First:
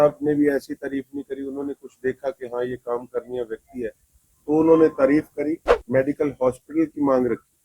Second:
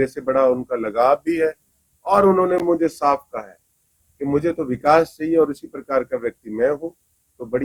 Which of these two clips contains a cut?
first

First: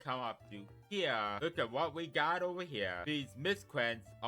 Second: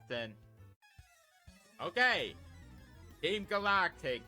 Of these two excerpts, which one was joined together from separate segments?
first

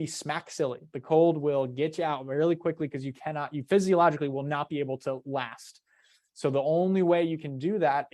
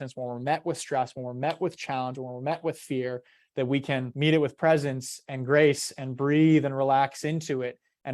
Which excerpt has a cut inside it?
second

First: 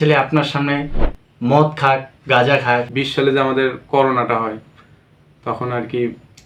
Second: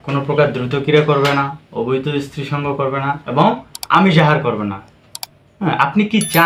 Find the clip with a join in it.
first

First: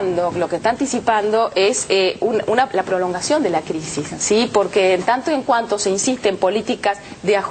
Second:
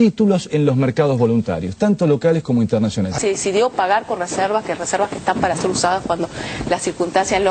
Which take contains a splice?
second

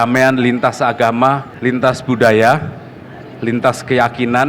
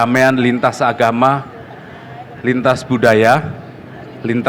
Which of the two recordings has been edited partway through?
first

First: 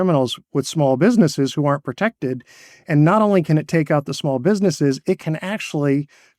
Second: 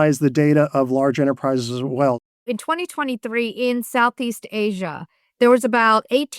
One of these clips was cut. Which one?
second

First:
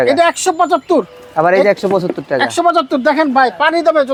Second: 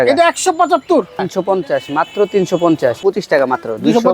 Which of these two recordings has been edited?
second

